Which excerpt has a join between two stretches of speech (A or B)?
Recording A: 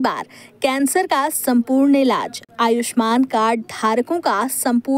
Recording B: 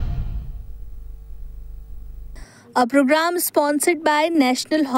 B